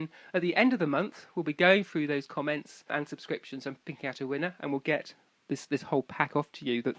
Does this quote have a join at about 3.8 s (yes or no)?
yes